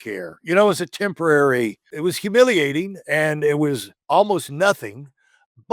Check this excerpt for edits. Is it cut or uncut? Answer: cut